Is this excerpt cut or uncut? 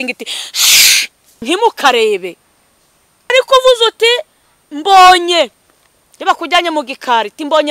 cut